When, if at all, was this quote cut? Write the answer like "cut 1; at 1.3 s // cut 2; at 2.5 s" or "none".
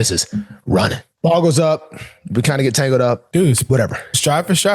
cut 1; at 1.1 s // cut 2; at 3.2 s